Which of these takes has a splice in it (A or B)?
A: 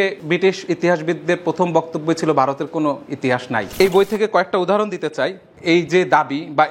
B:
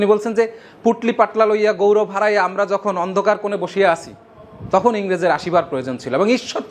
A